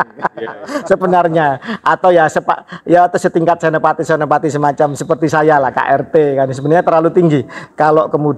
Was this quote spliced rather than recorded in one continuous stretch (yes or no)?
no